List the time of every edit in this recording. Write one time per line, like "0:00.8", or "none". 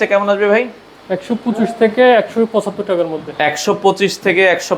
none